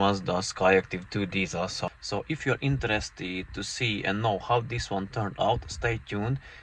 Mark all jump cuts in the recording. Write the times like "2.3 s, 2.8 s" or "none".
1.9 s